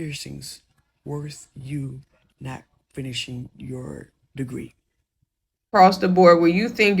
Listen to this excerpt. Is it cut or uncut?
cut